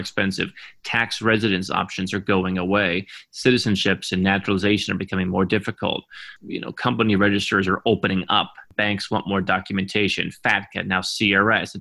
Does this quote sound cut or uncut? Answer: cut